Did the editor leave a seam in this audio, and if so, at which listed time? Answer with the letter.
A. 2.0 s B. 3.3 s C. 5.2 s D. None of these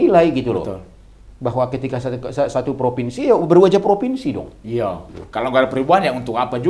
C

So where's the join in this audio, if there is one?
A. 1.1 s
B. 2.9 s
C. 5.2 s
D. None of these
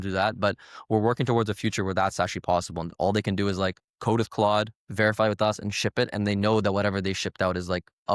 B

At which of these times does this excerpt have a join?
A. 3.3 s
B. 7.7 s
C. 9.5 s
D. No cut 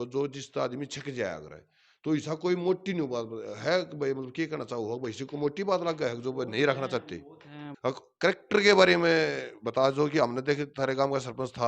B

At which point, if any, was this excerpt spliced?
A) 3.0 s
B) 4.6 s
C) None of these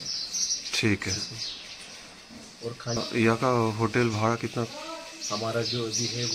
A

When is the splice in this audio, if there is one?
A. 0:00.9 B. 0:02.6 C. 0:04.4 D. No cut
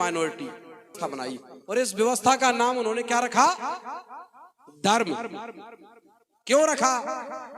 A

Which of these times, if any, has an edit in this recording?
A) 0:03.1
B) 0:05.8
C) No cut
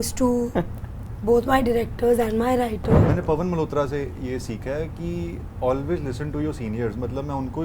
A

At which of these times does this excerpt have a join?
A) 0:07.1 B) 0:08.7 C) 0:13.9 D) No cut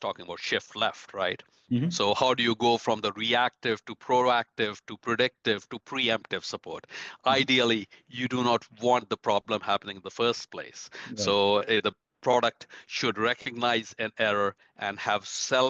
D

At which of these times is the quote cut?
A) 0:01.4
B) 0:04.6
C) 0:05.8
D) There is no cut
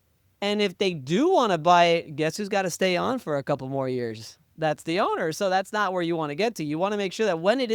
B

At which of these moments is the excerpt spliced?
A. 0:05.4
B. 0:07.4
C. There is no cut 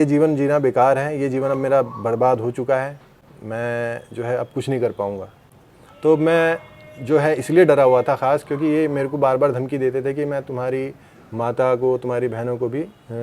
A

